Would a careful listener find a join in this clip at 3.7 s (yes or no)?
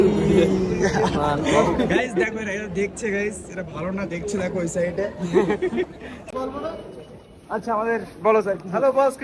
no